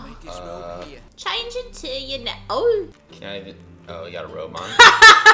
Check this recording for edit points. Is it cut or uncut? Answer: cut